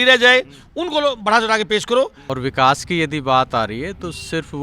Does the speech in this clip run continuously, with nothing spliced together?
no; 1 cut; at 2.2 s

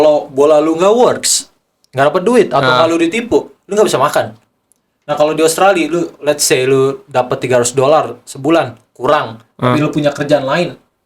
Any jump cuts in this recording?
no; 0 cuts

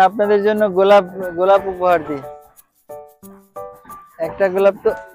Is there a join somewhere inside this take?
yes; 2 cuts; at 2.2 s, 4.2 s

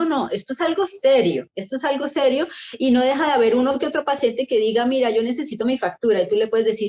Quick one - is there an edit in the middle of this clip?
no; 0 cuts

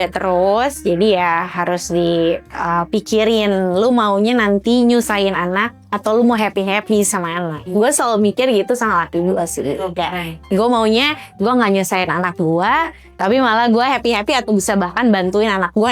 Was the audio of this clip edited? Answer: no; 0 cuts

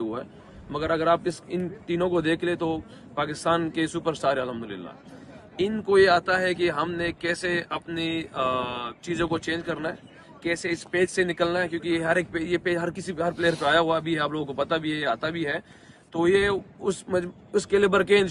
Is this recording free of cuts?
yes; 0 cuts

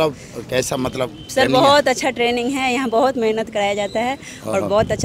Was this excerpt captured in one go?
yes; 0 cuts

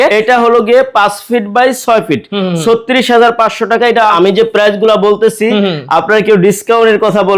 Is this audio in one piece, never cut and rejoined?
yes; 0 cuts

